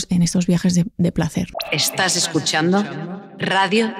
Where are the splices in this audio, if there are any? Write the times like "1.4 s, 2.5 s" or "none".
1.5 s